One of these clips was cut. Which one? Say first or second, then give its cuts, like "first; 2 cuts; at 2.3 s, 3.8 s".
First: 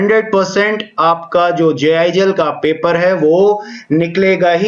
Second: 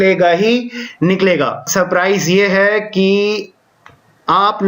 second; 1 cut; at 1.6 s